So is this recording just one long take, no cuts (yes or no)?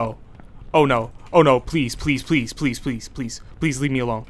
yes